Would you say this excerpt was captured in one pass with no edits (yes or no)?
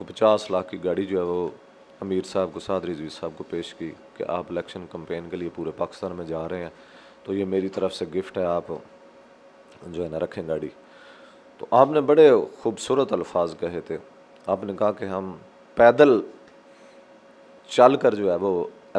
yes